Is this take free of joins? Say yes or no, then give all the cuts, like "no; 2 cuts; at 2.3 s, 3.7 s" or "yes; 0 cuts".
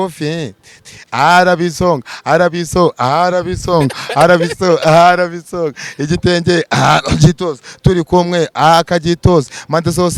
yes; 0 cuts